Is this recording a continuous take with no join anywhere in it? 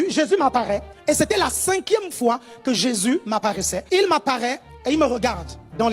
no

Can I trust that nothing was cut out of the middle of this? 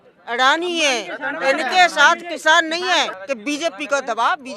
no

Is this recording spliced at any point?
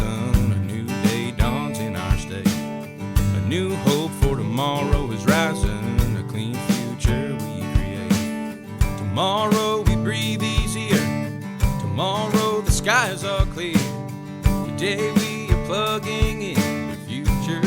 no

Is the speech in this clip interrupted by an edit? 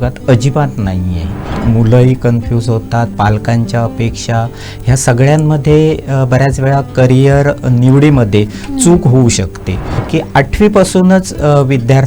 yes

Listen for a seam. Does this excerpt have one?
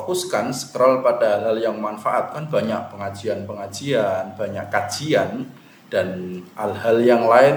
no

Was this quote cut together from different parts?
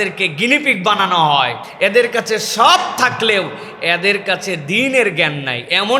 yes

